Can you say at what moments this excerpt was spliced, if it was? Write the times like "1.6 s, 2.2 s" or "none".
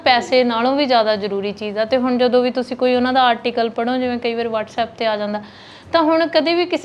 none